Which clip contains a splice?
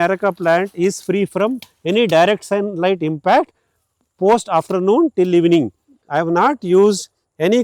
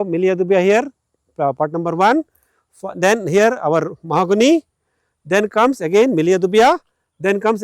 first; 1 cut; at 6.0 s

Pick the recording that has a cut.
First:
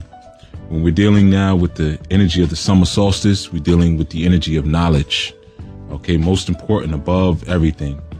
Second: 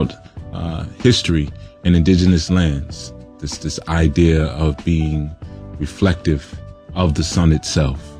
second; 1 cut; at 5.6 s

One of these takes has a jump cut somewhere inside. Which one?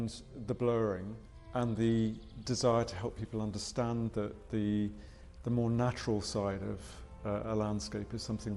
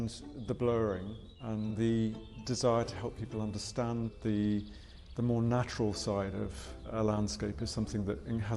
second; 2 cuts; at 4.1 s, 6.9 s

